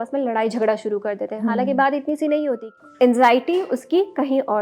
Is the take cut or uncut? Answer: cut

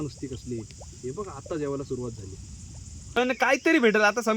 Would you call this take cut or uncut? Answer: cut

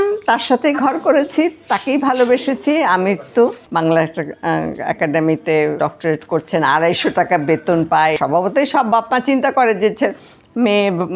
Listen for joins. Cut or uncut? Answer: cut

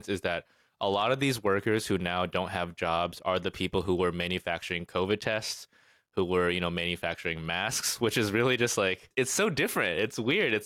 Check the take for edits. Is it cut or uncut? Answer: uncut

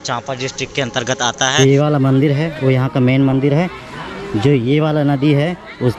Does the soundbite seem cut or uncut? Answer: cut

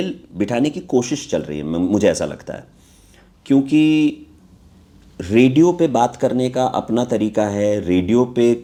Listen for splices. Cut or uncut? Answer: uncut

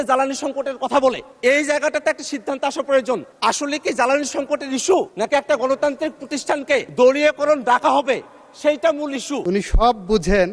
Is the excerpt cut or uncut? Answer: cut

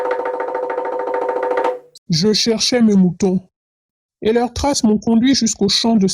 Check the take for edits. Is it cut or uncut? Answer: cut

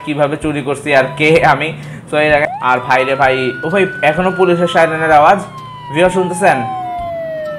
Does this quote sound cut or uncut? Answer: cut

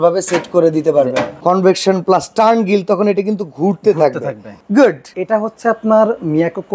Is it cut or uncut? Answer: cut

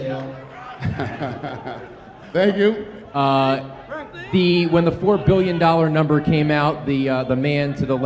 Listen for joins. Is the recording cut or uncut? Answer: cut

